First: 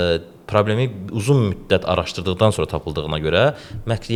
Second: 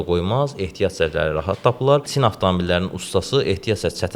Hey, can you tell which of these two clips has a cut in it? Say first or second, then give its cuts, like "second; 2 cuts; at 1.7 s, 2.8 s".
second; 1 cut; at 2.1 s